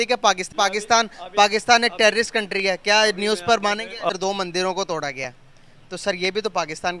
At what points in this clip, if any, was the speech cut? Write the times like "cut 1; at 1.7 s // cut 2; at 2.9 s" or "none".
cut 1; at 4.1 s // cut 2; at 6.3 s